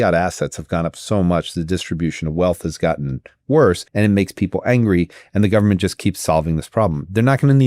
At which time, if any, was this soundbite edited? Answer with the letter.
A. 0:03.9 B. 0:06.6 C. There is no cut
A